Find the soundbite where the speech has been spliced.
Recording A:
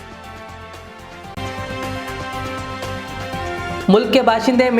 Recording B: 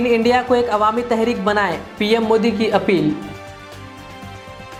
A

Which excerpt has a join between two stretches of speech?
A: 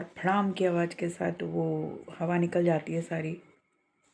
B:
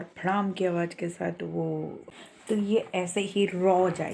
B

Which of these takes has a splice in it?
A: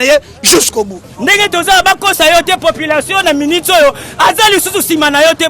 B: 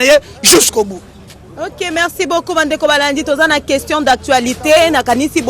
A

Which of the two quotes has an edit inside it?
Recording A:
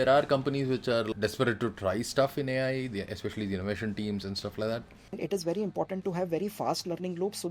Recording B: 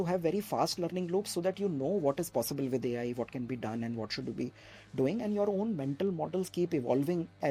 A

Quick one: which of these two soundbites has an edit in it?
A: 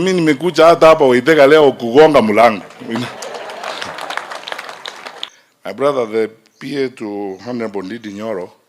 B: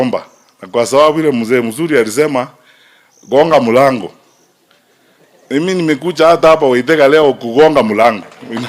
A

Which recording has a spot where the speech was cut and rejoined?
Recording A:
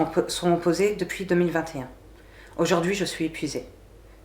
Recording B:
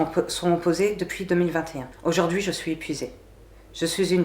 B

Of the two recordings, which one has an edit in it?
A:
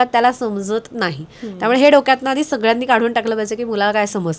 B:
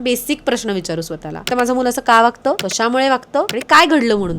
B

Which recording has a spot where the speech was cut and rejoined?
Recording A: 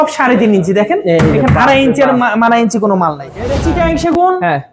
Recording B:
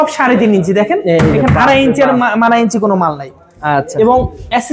A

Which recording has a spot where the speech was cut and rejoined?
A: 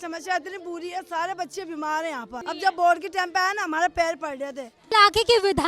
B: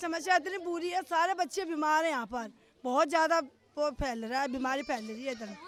A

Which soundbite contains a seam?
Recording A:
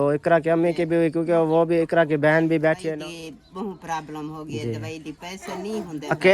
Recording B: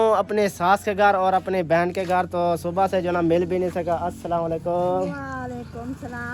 A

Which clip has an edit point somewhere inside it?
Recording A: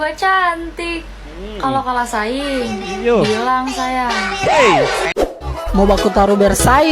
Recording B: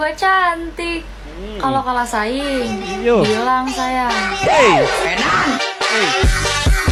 A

